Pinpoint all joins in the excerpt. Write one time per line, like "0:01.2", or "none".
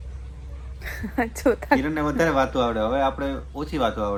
none